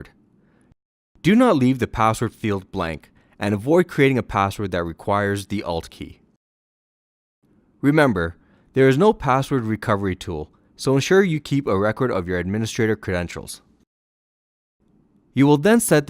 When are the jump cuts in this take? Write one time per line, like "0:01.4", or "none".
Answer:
0:08.9